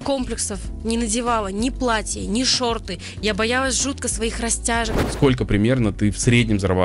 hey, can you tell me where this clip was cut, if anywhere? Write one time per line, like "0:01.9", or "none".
0:05.0